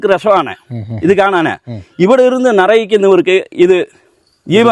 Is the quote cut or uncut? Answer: uncut